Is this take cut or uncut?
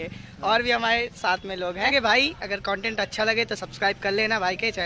cut